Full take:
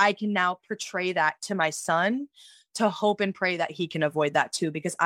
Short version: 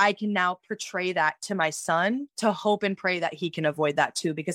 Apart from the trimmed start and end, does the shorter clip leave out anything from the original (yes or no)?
yes